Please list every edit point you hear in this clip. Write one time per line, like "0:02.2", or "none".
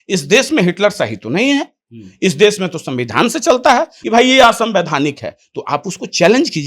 0:04.0